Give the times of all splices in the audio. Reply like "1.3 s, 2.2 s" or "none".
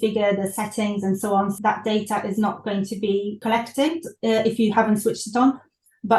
1.5 s, 3.4 s